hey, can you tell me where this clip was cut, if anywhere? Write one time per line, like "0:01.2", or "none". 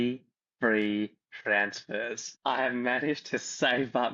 0:02.4